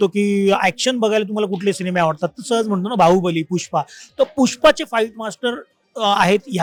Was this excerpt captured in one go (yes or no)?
yes